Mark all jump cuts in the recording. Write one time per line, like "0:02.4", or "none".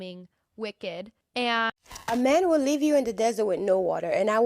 0:01.7